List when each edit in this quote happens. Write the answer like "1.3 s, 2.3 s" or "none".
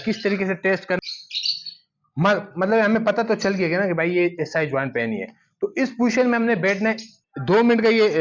1.0 s, 7.1 s